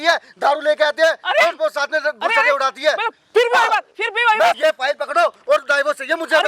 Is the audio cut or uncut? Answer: cut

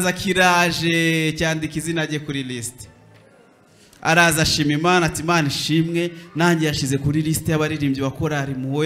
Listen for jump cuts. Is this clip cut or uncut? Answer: uncut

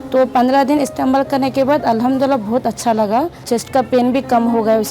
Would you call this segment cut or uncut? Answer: cut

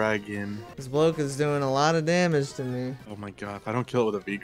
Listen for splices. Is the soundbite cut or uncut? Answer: uncut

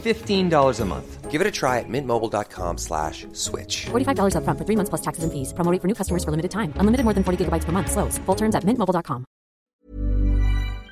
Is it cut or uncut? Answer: cut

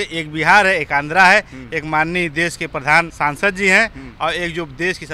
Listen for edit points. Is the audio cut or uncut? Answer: cut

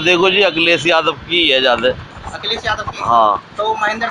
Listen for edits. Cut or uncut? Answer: uncut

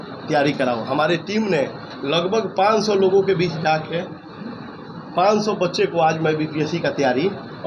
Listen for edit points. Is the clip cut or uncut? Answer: uncut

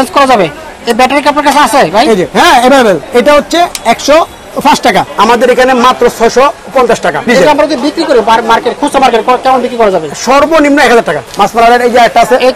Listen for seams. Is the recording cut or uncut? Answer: cut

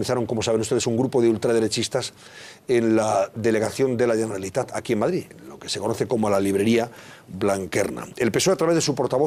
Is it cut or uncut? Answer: uncut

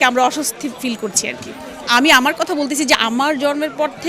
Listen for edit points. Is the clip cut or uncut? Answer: uncut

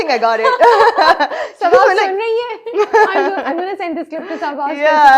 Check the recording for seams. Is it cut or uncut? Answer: uncut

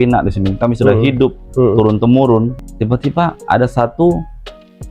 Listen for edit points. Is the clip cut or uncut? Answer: cut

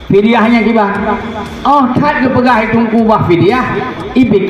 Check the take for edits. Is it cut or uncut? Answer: uncut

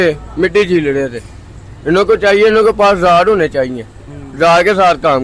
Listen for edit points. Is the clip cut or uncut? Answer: uncut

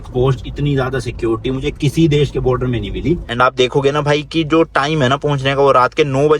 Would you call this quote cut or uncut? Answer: cut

